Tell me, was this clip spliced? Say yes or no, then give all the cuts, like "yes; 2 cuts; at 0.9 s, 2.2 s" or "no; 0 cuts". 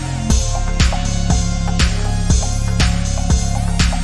no; 0 cuts